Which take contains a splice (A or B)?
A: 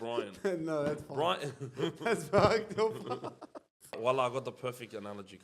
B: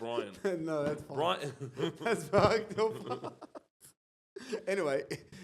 A